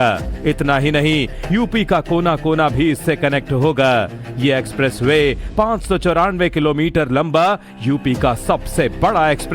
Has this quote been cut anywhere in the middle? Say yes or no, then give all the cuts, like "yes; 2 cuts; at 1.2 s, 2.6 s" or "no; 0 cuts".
yes; 1 cut; at 5.4 s